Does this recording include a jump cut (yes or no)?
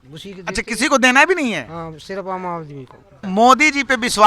yes